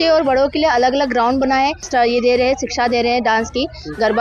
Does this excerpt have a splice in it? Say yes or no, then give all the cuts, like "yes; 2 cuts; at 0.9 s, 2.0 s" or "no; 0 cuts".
yes; 1 cut; at 1.9 s